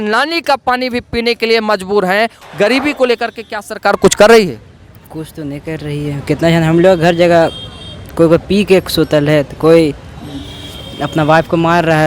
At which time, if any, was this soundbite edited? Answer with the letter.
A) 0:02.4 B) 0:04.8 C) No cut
A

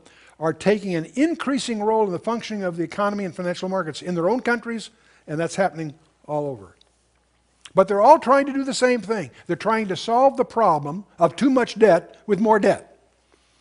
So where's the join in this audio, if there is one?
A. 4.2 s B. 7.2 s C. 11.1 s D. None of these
D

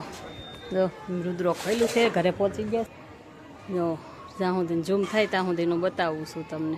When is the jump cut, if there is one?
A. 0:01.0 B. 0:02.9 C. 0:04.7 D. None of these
B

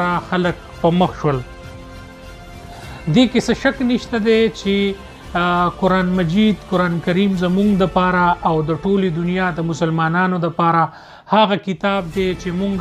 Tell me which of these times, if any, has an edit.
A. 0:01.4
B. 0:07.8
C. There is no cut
C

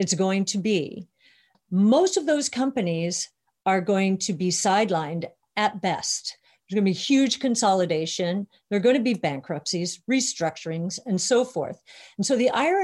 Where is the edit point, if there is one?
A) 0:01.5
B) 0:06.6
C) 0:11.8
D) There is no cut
A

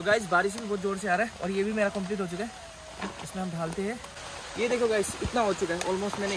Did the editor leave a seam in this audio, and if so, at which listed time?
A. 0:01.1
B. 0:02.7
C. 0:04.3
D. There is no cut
C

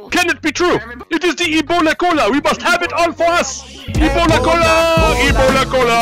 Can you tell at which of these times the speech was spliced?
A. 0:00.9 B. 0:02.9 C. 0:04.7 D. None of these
A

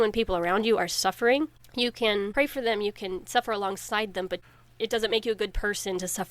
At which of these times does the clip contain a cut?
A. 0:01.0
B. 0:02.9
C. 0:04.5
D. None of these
C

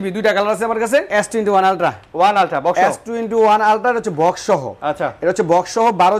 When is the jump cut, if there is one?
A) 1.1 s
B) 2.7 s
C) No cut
A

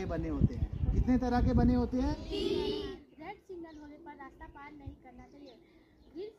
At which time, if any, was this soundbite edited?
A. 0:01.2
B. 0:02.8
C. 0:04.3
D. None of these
B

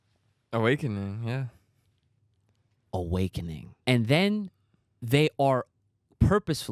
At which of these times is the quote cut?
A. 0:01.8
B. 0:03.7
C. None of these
B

